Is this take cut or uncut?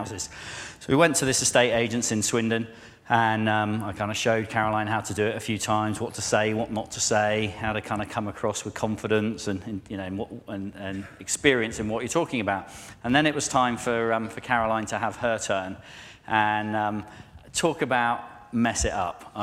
cut